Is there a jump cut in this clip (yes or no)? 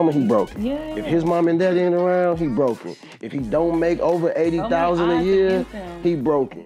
no